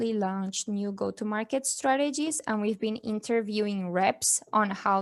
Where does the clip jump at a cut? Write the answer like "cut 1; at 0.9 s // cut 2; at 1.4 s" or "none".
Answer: none